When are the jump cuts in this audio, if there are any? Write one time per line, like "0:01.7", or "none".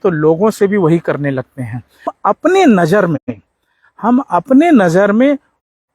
0:02.1